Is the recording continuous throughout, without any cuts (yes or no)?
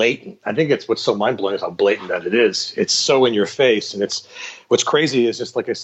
yes